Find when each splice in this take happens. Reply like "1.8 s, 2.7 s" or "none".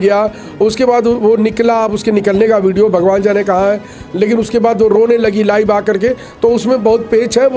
none